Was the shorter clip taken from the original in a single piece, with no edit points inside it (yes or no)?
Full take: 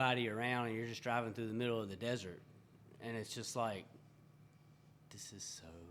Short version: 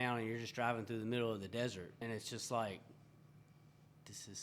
no